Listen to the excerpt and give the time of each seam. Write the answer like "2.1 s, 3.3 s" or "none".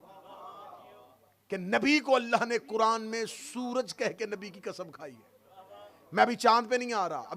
none